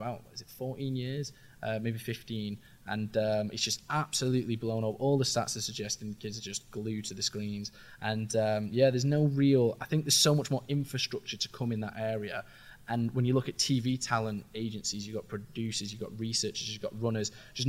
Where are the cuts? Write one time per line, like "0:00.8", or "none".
none